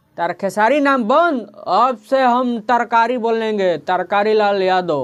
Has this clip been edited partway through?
no; 0 cuts

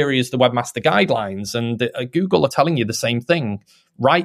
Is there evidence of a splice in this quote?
yes; 1 cut; at 2.5 s

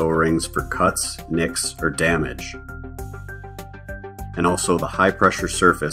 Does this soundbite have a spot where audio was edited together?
yes; 2 cuts; at 2.3 s, 4.4 s

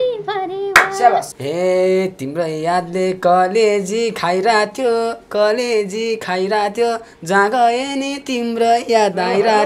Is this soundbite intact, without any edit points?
no; 1 cut; at 1.3 s

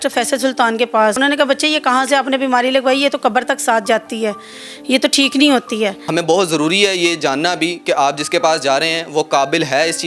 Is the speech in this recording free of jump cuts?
no; 2 cuts; at 1.2 s, 6.0 s

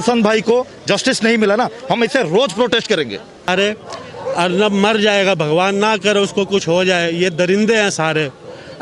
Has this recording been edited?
yes; 1 cut; at 3.5 s

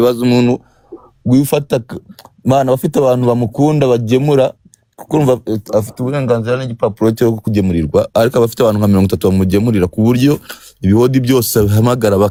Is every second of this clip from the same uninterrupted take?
yes; 0 cuts

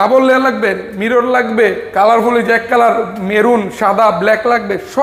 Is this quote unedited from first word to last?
yes; 0 cuts

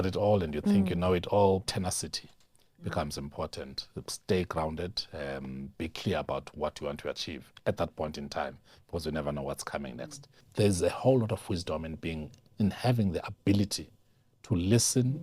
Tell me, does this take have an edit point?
yes; 2 cuts; at 1.6 s, 10.4 s

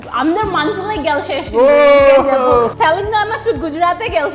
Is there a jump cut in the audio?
yes; 1 cut; at 2.7 s

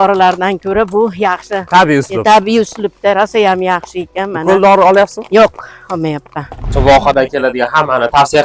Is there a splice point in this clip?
yes; 1 cut; at 6.7 s

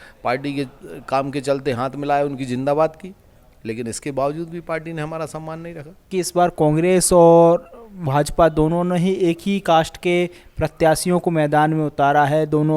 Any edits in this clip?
yes; 1 cut; at 6.1 s

